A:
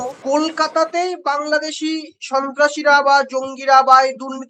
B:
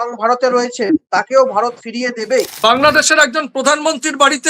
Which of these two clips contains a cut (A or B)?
B